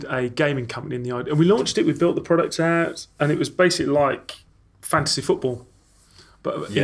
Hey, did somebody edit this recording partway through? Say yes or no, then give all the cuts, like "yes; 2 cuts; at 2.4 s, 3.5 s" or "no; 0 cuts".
no; 0 cuts